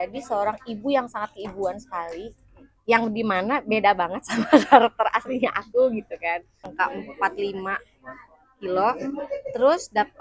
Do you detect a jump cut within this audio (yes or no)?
yes